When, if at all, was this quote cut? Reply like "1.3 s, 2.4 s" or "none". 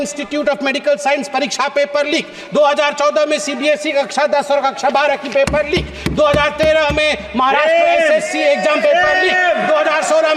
none